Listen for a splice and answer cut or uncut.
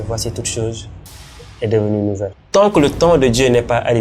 cut